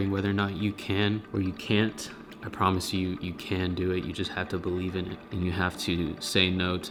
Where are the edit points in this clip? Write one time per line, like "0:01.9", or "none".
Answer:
none